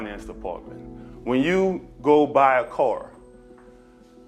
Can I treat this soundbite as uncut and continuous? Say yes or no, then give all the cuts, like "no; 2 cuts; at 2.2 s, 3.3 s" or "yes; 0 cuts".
yes; 0 cuts